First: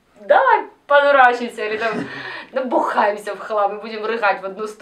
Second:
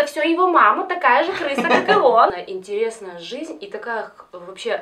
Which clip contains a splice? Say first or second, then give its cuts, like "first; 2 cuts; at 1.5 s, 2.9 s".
second; 1 cut; at 2.4 s